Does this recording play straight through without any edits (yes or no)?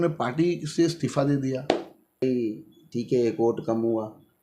no